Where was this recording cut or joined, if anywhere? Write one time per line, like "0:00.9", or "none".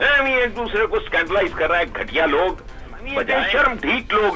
0:03.3